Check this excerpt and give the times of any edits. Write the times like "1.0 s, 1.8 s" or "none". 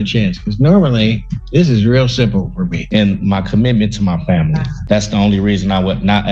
2.8 s